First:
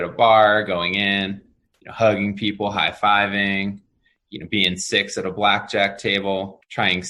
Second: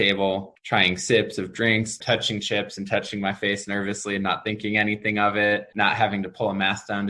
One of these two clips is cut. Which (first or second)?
second